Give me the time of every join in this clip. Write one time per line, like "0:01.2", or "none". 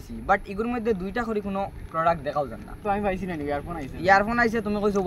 none